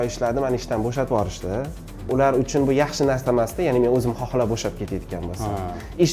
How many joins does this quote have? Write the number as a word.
one